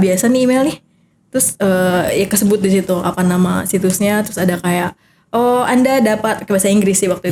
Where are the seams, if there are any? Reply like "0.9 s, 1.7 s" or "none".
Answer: none